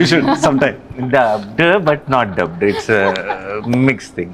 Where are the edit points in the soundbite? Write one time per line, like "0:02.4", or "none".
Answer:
none